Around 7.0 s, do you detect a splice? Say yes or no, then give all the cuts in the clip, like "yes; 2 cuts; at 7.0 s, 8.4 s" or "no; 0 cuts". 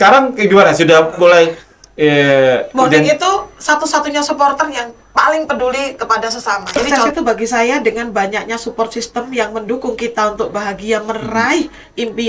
yes; 1 cut; at 7.0 s